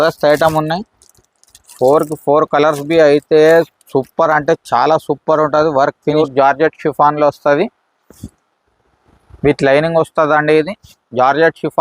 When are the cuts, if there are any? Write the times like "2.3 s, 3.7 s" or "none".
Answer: 6.2 s